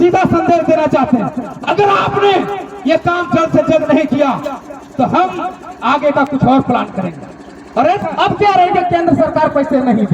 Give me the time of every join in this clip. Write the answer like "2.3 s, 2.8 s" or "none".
8.0 s

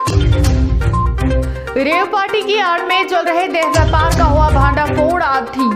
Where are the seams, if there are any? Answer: 1.3 s

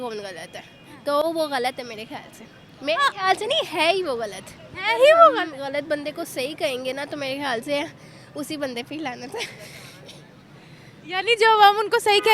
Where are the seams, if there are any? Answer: 5.5 s

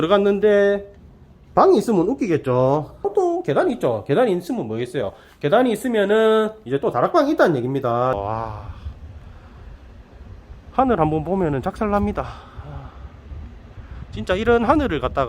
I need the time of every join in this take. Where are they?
3.1 s, 8.2 s

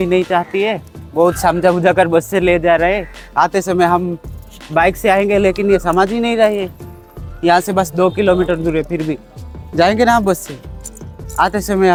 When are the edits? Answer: none

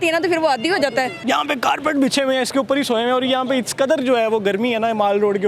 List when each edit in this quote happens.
1.2 s

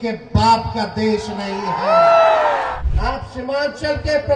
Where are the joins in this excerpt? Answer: 2.7 s

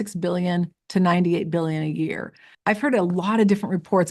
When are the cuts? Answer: 2.5 s

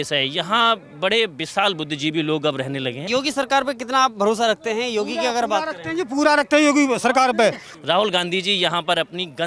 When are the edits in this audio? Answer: 3.0 s, 7.7 s

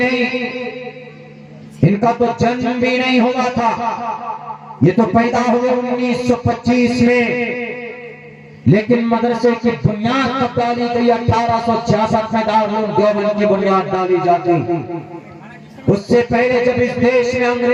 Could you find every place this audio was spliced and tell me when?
none

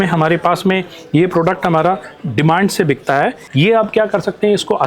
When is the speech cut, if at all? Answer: 3.4 s

